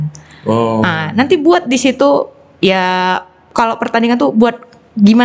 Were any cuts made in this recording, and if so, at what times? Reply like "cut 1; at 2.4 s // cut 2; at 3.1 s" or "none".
none